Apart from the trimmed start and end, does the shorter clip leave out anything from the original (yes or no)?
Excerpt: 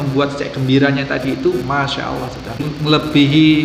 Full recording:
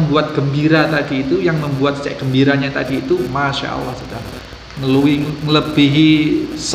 yes